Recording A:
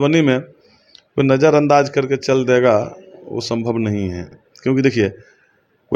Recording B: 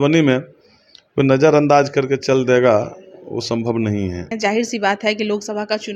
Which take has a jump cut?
B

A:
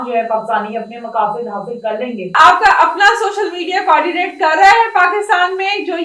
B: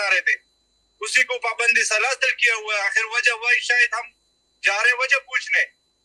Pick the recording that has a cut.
A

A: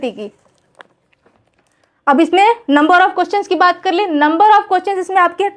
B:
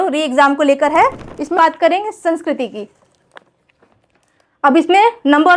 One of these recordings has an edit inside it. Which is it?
B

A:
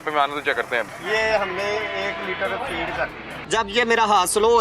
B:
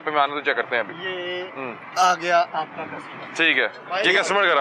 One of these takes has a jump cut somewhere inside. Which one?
A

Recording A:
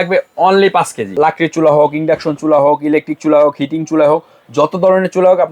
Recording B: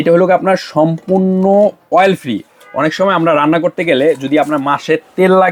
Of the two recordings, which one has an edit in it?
A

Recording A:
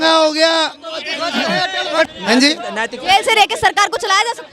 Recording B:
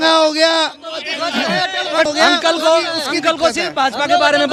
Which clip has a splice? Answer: A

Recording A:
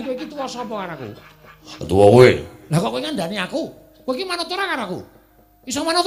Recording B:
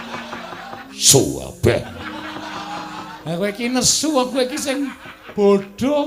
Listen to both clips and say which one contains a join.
B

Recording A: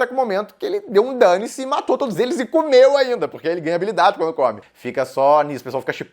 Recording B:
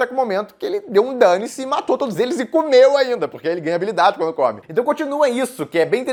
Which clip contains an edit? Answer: A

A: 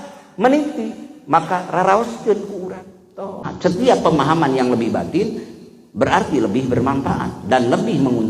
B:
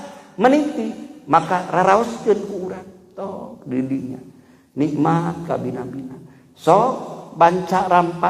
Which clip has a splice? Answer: A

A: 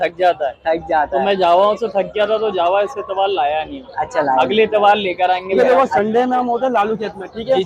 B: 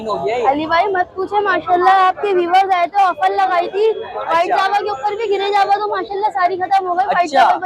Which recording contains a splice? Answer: A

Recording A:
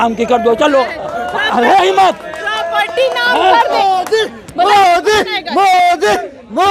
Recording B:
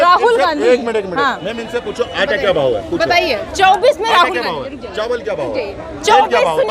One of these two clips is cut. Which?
A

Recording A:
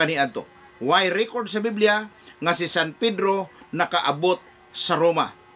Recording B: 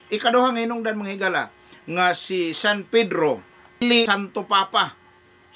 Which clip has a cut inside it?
B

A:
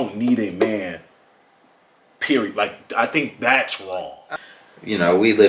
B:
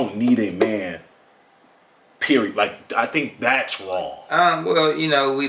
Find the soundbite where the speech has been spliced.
A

